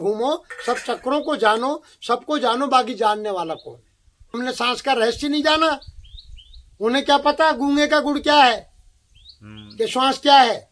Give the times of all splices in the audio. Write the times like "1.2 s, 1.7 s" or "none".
4.4 s